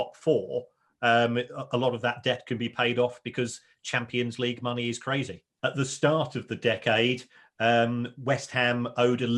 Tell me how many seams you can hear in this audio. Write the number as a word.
one